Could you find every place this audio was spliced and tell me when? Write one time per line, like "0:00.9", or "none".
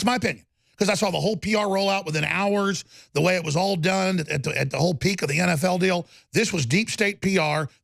none